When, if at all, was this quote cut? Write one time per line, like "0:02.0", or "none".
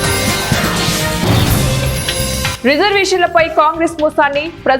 none